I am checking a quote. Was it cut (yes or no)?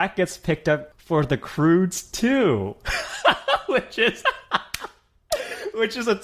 yes